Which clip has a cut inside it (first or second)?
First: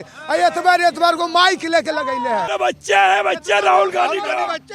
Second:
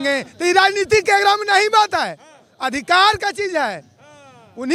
first